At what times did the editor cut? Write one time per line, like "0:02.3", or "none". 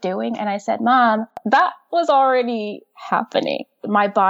0:01.4